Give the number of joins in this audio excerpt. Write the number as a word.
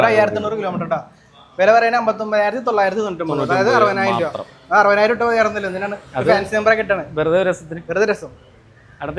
zero